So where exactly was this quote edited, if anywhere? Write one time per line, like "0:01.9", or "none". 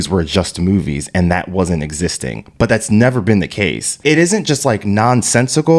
0:04.0